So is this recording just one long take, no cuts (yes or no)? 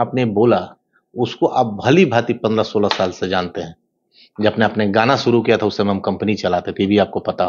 yes